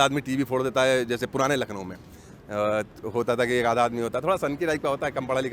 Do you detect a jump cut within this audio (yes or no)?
no